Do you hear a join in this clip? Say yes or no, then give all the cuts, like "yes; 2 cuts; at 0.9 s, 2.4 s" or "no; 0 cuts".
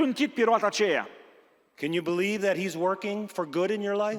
no; 0 cuts